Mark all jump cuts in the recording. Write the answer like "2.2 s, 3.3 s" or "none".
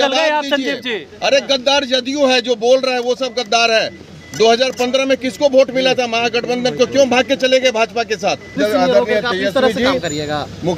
8.6 s